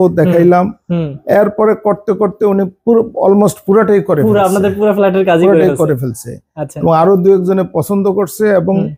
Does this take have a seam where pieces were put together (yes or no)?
no